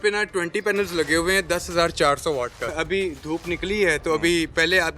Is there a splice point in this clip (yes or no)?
yes